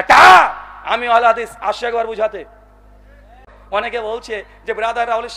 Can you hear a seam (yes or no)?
yes